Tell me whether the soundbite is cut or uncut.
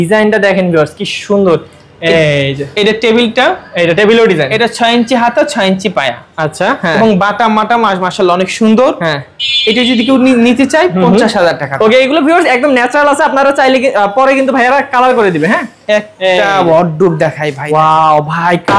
uncut